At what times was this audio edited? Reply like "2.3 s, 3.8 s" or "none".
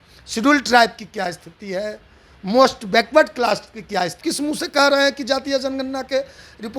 4.2 s